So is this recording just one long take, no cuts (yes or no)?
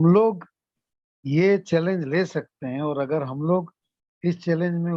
yes